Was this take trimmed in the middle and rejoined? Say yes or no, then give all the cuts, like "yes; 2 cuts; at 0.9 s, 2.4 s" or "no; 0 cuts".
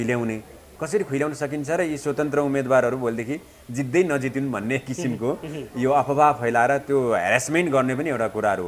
no; 0 cuts